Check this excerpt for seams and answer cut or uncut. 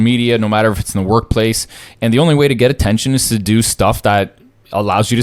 uncut